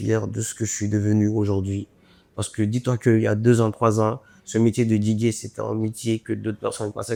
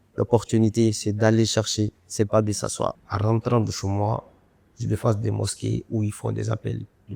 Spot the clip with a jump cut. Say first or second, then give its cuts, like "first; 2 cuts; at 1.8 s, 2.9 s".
second; 1 cut; at 3.0 s